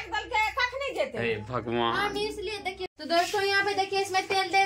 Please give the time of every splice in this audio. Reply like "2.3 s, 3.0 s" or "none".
2.9 s